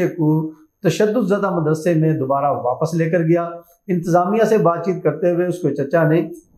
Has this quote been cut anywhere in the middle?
no; 0 cuts

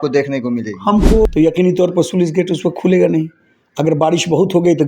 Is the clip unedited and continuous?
no; 1 cut; at 1.2 s

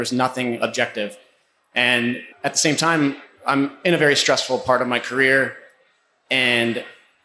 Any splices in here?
yes; 1 cut; at 2.3 s

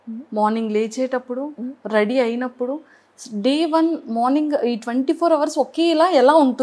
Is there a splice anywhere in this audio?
no; 0 cuts

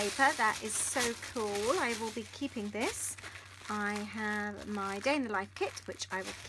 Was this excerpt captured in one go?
no; 1 cut; at 4.6 s

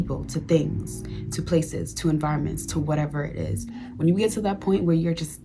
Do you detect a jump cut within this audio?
yes; 1 cut; at 4.0 s

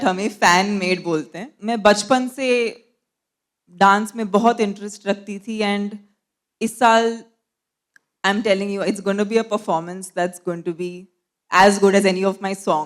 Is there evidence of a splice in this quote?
yes; 1 cut; at 1.5 s

